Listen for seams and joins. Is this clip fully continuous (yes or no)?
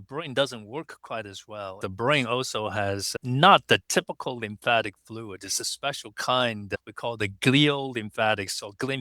no